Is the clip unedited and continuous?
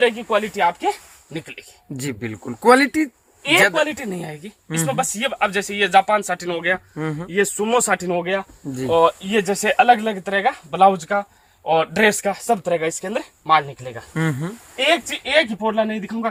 yes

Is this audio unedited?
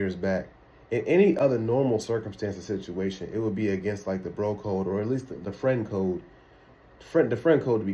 yes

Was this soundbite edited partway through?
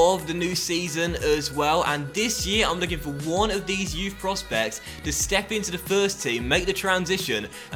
no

